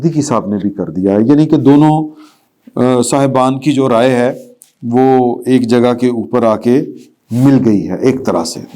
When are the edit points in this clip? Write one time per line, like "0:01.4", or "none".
none